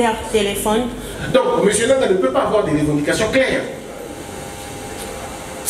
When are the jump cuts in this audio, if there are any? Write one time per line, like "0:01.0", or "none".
0:01.1